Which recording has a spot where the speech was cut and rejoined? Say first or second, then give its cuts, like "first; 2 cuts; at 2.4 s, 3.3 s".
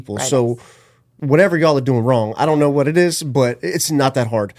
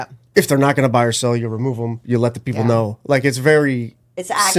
first; 1 cut; at 1.2 s